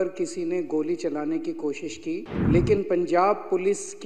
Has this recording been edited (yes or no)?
yes